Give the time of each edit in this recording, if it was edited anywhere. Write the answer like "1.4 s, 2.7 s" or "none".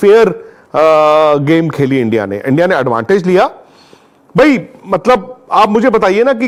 none